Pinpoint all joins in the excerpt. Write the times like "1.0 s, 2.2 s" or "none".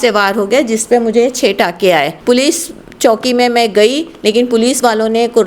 2.1 s